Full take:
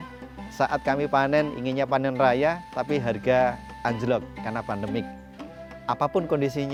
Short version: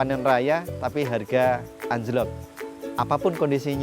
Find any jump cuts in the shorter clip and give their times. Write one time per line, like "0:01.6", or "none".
0:02.4